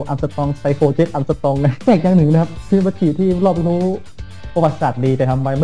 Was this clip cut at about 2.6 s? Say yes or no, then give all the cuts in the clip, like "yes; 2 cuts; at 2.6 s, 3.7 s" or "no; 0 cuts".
yes; 2 cuts; at 1.8 s, 2.6 s